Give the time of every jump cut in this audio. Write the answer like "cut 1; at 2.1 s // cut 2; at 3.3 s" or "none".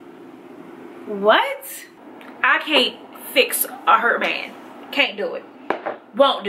cut 1; at 1.9 s